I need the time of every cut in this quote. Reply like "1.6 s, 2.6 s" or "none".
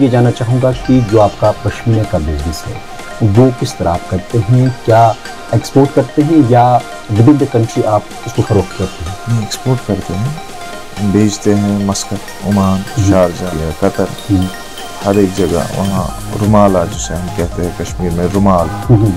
13.6 s